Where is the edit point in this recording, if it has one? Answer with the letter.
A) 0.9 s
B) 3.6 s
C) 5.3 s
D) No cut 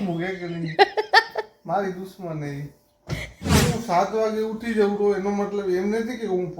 B